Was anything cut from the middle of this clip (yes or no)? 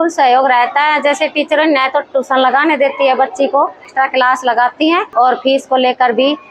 yes